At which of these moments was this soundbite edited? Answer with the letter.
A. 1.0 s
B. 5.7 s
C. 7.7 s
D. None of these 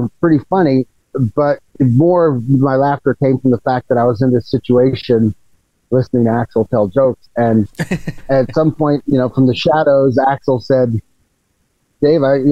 A